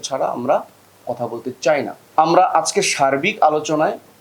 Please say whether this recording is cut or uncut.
cut